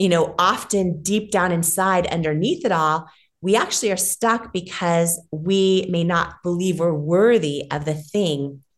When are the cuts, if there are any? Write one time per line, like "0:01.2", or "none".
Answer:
none